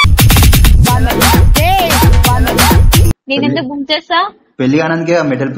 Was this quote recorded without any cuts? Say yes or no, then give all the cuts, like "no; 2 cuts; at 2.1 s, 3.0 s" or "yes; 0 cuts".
no; 1 cut; at 3.1 s